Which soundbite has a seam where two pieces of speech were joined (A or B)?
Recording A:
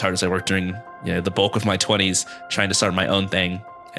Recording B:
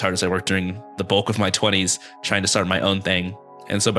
B